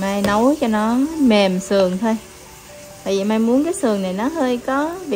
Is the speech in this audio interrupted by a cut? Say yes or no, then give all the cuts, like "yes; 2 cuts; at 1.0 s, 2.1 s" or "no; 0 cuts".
no; 0 cuts